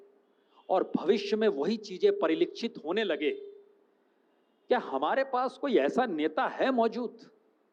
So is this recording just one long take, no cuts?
yes; 0 cuts

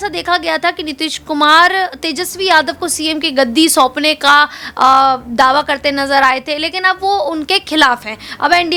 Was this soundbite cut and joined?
no; 0 cuts

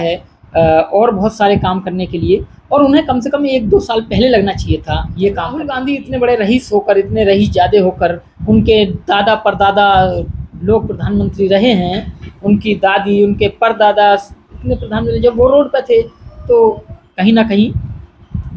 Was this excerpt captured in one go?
no; 1 cut; at 5.8 s

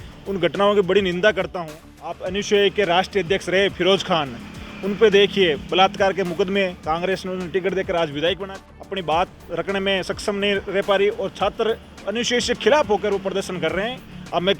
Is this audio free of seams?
no; 2 cuts; at 2.3 s, 8.4 s

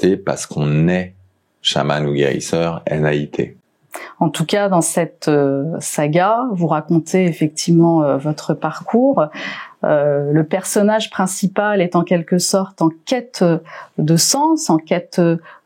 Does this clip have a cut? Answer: no; 0 cuts

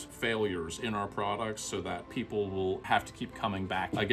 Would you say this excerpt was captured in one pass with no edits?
yes; 0 cuts

